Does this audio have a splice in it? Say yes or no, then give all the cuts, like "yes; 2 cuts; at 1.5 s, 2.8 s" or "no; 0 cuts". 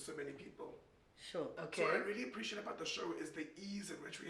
yes; 1 cut; at 1.5 s